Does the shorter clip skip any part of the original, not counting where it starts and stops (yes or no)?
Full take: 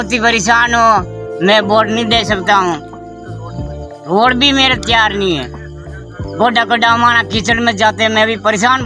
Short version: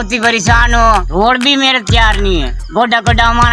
yes